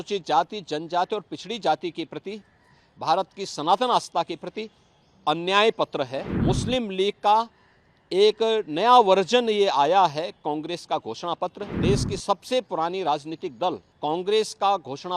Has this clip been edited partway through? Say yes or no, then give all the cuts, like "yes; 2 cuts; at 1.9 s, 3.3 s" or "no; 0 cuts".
yes; 3 cuts; at 6.3 s, 11.7 s, 13.9 s